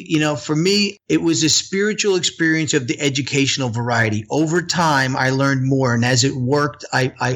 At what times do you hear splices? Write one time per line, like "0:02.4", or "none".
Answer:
0:00.9